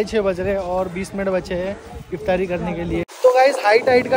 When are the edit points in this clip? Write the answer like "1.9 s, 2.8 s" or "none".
3.1 s